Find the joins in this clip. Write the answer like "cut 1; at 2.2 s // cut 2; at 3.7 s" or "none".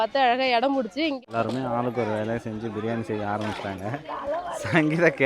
cut 1; at 1.2 s